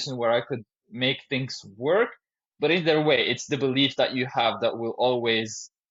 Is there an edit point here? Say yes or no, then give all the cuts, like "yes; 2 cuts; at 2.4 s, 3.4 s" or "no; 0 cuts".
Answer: no; 0 cuts